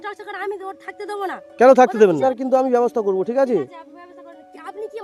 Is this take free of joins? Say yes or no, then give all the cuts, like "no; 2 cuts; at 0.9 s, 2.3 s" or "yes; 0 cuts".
no; 1 cut; at 2.2 s